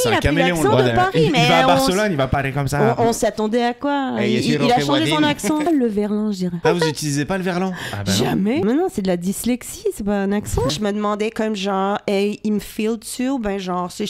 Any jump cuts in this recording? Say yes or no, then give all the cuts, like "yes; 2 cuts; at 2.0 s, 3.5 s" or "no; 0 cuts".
yes; 4 cuts; at 5.7 s, 6.6 s, 8.6 s, 10.7 s